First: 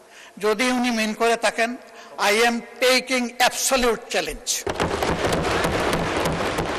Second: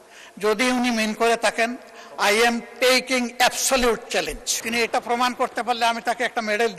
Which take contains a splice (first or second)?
second